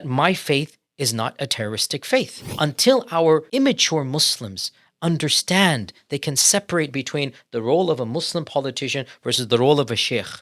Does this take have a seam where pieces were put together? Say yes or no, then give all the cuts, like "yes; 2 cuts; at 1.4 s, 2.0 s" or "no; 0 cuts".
yes; 2 cuts; at 2.4 s, 3.5 s